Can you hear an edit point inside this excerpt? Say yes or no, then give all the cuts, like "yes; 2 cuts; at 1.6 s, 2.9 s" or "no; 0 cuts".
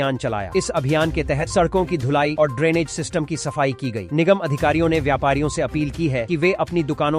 no; 0 cuts